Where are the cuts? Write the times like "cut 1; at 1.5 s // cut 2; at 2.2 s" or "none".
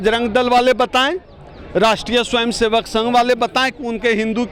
none